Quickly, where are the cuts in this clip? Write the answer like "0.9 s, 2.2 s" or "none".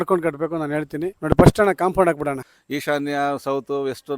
1.1 s, 2.5 s